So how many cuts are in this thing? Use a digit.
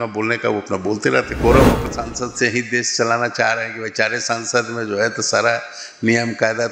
1